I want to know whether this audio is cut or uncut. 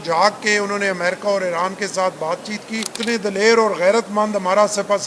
cut